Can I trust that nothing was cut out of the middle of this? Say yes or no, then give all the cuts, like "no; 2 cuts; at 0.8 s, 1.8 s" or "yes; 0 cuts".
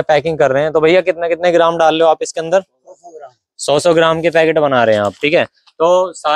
yes; 0 cuts